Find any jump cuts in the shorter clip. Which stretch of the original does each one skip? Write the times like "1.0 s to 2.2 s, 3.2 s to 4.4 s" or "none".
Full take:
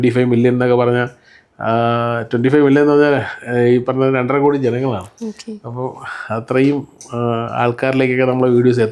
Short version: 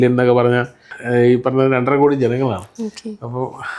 1.4 s to 3.4 s